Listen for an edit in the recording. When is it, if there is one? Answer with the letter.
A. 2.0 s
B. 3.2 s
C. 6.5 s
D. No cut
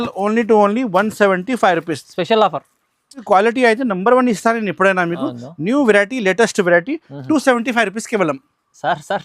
B